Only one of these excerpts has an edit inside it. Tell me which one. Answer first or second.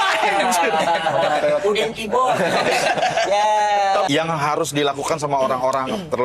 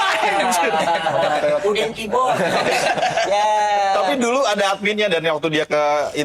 first